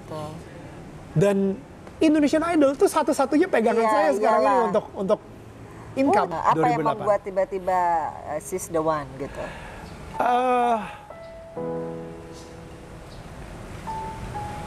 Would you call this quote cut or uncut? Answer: cut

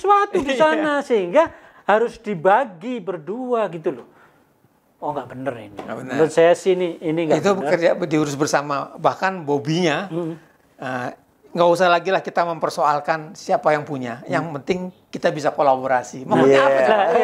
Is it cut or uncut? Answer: uncut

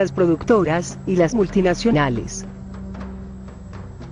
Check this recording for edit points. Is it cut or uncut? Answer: cut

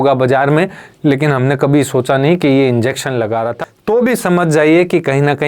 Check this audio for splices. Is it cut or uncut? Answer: cut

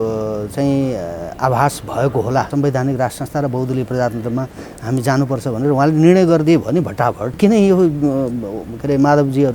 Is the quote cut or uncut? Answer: cut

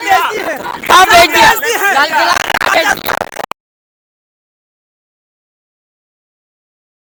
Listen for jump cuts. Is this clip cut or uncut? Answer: uncut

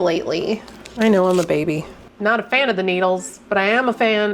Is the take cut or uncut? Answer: cut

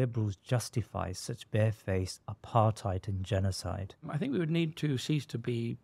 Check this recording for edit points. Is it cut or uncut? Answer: cut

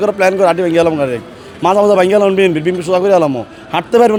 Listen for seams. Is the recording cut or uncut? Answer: uncut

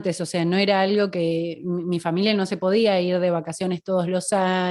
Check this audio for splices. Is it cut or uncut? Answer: uncut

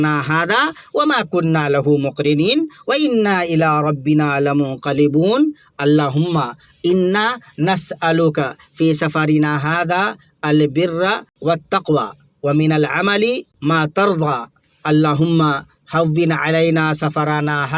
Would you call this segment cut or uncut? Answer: cut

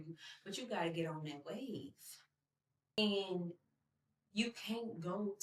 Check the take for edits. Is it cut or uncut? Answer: cut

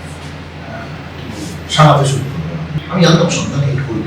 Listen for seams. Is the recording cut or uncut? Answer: cut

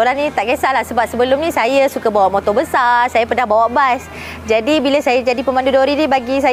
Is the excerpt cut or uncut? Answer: uncut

